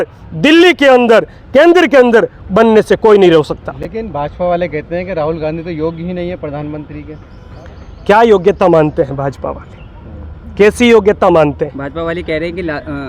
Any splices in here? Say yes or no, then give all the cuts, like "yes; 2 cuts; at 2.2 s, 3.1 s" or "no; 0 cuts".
no; 0 cuts